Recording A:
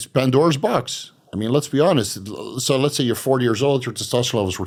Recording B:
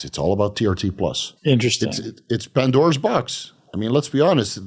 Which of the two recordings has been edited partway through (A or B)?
B